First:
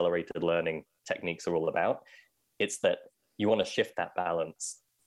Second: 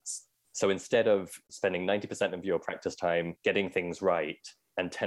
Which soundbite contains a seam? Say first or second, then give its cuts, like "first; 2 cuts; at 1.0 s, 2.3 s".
second; 2 cuts; at 1.5 s, 3.3 s